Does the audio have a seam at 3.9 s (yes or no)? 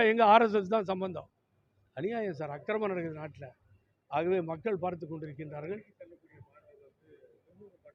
no